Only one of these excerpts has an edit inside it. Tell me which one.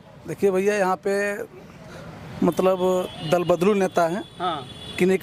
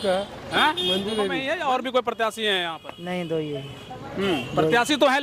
second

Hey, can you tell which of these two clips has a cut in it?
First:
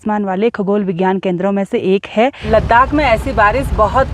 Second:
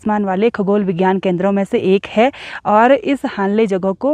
first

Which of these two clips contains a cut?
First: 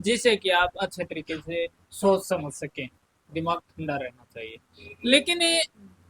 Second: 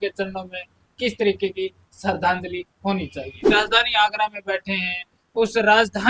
second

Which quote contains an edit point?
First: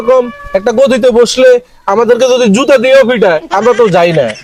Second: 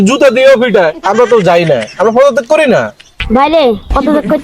second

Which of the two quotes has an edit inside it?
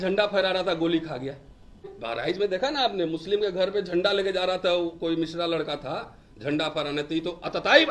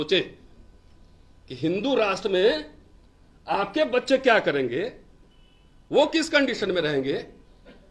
first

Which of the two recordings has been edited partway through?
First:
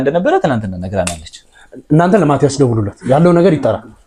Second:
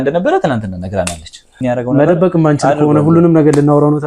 second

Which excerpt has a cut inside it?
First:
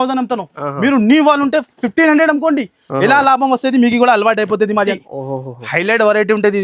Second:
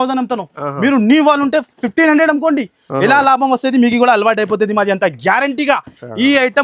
first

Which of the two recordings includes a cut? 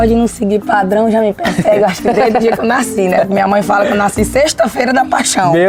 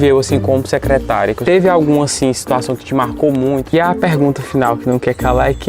second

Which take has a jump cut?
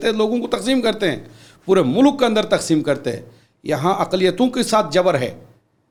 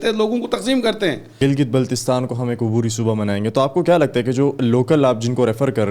second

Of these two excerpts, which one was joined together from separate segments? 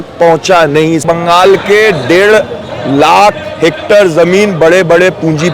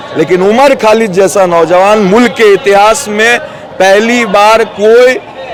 first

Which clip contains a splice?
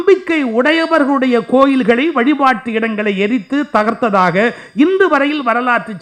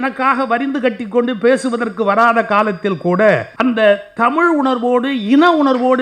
second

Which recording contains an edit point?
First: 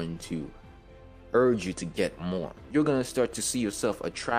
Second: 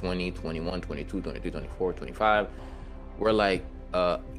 first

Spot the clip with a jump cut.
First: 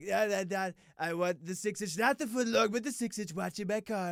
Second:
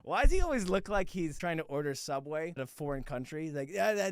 second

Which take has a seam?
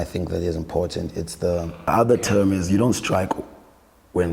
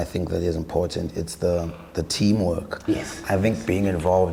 first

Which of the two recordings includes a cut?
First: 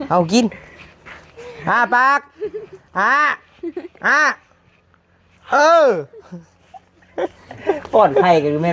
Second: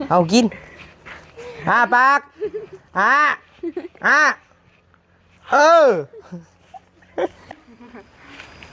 second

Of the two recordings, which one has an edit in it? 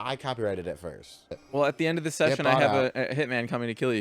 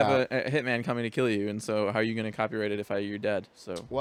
first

